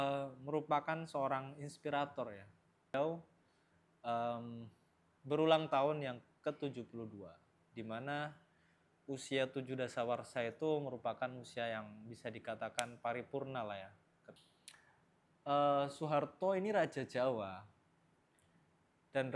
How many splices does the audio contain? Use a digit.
2